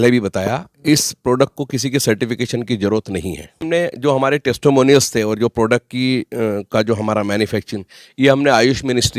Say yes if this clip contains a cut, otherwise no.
yes